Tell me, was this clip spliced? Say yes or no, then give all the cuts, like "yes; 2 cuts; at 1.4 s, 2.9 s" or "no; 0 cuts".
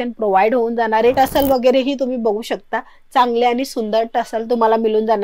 yes; 1 cut; at 1.2 s